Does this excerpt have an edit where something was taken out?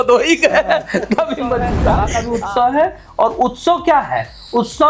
yes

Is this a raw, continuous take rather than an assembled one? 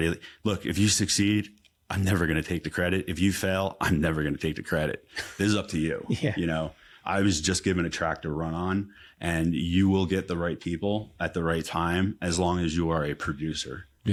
yes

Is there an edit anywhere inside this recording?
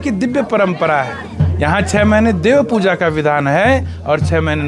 no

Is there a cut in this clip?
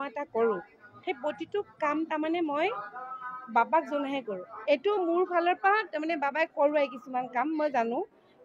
yes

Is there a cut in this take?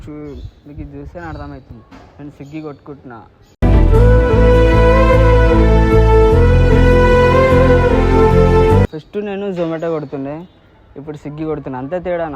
no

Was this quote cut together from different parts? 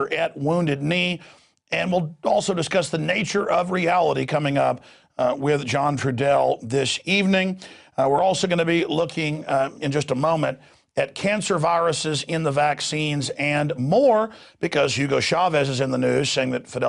yes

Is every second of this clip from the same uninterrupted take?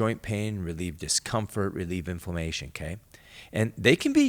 yes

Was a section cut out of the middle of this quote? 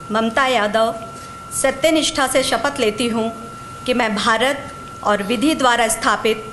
no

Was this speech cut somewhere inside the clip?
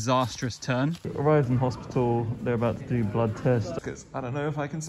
yes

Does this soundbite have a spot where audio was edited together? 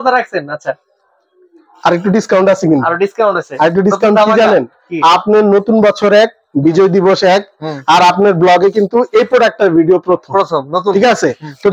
no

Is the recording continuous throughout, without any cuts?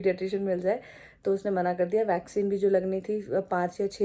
yes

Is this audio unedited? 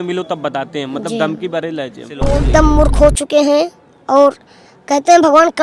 no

